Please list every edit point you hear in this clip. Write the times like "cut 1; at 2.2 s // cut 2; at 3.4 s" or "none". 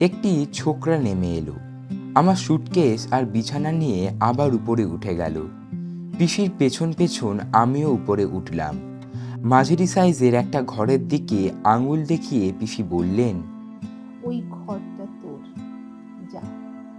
none